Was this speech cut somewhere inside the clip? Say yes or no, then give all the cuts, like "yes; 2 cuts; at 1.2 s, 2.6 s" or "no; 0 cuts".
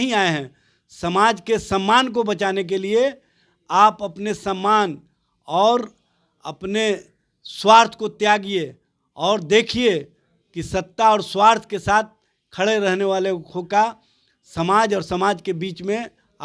no; 0 cuts